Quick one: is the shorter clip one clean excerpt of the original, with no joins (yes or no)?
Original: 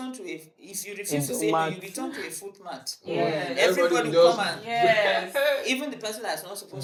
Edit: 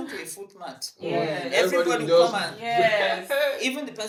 yes